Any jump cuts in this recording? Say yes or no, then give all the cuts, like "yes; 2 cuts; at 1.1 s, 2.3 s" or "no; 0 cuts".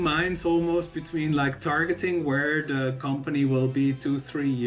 no; 0 cuts